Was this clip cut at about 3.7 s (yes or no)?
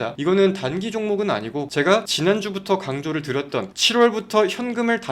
no